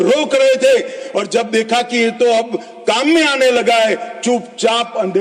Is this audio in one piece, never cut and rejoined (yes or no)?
yes